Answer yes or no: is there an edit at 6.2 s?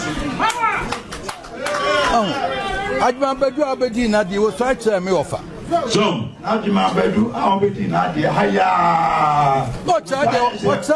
no